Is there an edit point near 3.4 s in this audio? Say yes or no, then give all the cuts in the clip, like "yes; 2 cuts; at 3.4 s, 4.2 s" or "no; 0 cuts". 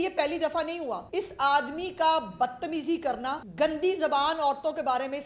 yes; 2 cuts; at 1.1 s, 3.4 s